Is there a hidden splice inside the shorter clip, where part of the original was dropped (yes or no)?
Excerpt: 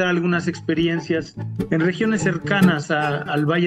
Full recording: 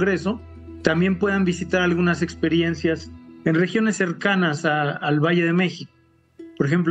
no